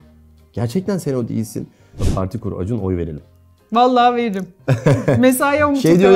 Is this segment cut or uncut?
cut